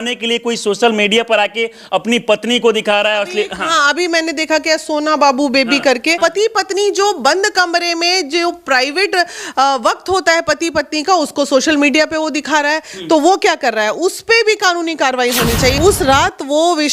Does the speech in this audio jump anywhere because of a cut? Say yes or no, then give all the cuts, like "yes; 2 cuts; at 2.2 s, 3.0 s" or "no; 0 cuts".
yes; 2 cuts; at 6.2 s, 15.8 s